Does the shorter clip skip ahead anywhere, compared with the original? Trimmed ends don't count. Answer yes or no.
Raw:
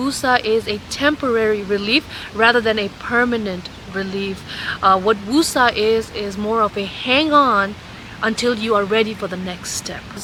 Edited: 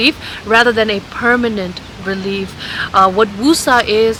no